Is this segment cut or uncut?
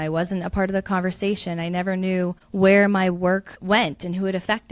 cut